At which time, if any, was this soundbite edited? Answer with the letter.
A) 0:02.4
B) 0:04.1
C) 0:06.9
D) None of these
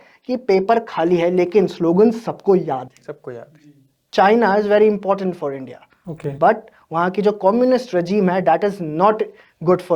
B